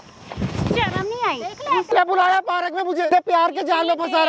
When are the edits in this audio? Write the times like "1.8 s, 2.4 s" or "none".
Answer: 1.9 s, 3.1 s